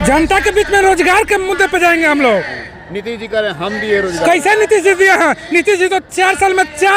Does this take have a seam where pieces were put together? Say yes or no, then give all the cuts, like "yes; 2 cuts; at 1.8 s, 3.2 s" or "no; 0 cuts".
no; 0 cuts